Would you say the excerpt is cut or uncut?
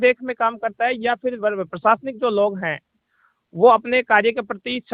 uncut